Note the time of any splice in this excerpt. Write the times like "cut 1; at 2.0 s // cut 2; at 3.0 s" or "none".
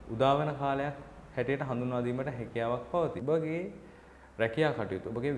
cut 1; at 3.2 s